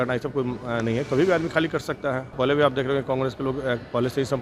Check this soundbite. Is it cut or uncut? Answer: cut